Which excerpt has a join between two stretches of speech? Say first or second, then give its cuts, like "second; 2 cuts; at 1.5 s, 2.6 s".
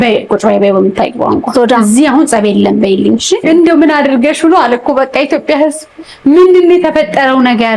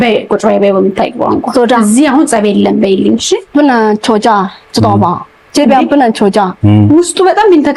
first; 1 cut; at 3.4 s